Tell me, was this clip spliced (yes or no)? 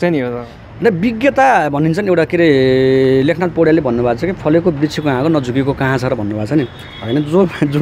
no